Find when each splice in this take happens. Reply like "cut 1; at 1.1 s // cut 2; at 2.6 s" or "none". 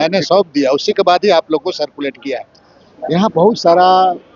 none